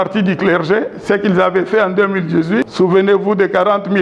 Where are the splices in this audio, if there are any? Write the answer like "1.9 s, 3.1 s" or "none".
2.7 s